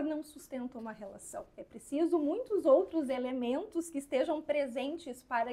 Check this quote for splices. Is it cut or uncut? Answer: uncut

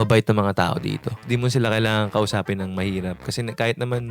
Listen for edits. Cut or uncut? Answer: cut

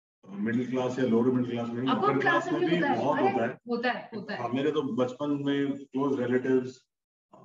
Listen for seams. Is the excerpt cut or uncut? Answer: cut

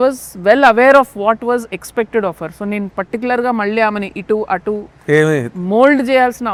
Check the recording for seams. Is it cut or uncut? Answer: uncut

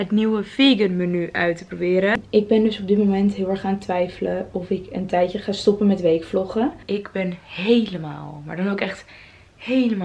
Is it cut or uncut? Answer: cut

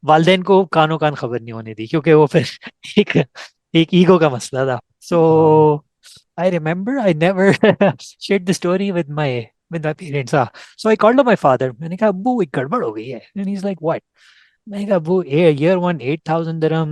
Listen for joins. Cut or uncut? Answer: uncut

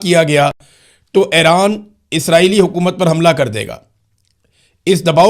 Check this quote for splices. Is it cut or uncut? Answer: uncut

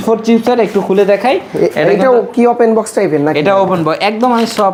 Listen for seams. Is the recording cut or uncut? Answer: uncut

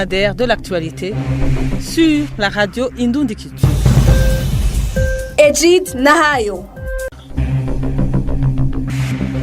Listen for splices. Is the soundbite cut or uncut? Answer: cut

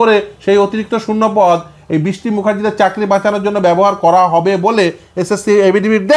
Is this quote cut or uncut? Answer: uncut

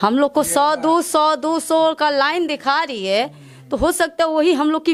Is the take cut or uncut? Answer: uncut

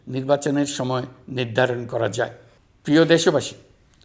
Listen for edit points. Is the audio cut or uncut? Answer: uncut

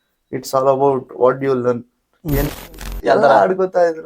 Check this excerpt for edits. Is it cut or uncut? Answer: cut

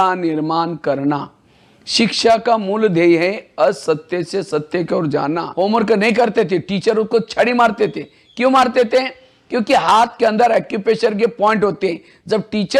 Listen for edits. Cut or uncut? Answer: cut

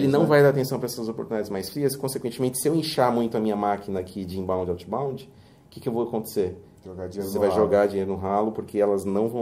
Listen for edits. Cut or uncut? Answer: uncut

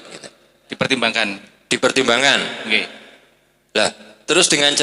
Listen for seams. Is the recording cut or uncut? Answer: uncut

